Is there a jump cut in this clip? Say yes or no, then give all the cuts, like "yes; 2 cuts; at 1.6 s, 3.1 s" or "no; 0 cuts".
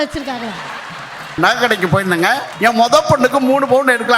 yes; 2 cuts; at 1.4 s, 2.5 s